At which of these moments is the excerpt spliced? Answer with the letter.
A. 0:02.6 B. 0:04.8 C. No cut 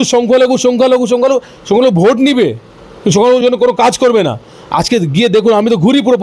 C